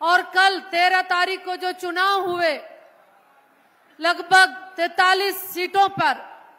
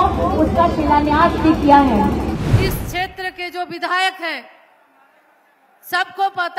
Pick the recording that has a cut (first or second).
second